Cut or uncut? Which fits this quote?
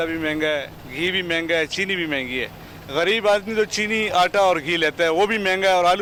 uncut